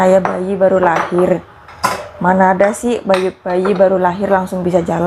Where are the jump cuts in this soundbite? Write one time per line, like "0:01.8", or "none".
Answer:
none